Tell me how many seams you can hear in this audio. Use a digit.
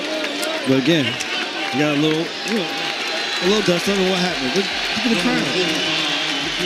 0